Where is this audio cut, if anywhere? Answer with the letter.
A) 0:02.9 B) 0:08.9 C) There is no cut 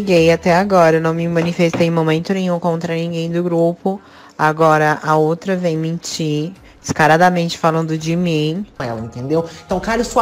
B